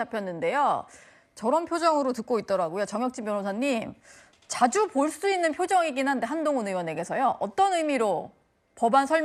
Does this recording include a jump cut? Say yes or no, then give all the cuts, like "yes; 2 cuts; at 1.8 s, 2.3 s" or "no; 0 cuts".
no; 0 cuts